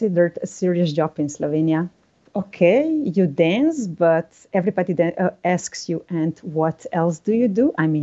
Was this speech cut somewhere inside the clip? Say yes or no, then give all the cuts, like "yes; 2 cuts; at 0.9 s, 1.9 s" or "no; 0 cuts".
yes; 1 cut; at 2.1 s